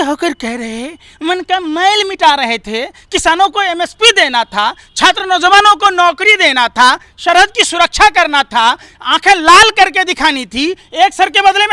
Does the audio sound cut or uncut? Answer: uncut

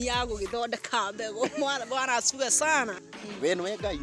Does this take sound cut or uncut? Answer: cut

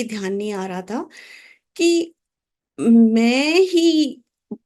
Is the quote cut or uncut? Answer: uncut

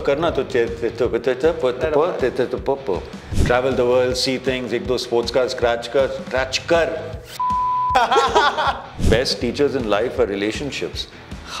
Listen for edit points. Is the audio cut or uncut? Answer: cut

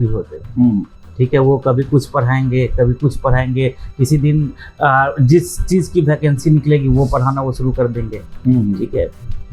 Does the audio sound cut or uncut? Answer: uncut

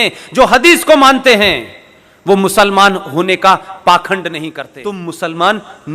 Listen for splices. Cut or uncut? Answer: cut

